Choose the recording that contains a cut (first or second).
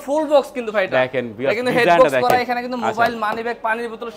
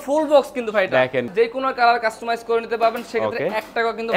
second